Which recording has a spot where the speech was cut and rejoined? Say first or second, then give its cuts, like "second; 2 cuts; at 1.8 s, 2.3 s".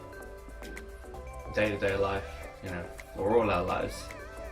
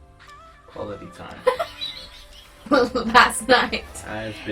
second; 1 cut; at 2.7 s